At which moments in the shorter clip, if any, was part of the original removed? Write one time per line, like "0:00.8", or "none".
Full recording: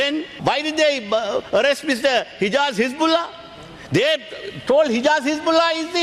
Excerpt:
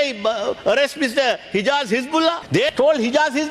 0:02.5